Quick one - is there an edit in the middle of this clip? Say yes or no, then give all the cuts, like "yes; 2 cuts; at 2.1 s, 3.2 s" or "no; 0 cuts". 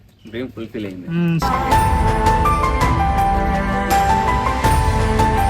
yes; 1 cut; at 1.4 s